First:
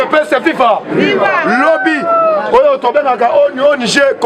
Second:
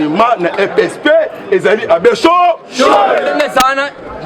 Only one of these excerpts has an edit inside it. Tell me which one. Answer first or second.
second